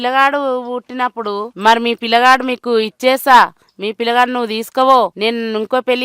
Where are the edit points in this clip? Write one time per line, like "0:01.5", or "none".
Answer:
0:01.5
0:05.1